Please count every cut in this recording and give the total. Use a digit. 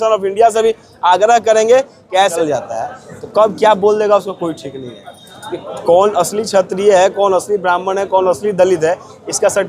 1